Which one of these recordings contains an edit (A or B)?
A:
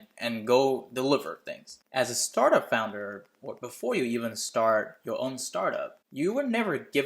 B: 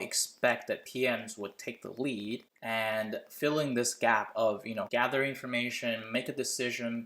B